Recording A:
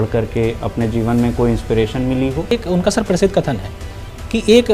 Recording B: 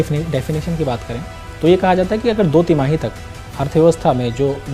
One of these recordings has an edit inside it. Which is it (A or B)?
A